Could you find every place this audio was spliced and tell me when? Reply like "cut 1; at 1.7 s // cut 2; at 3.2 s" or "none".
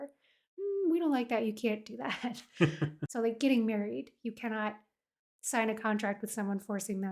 cut 1; at 3.0 s